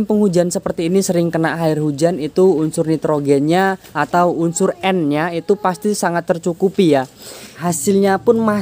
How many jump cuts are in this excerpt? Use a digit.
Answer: 1